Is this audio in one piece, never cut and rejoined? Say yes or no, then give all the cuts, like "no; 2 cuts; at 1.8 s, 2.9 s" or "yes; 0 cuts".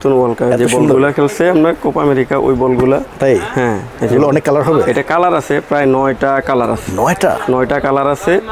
yes; 0 cuts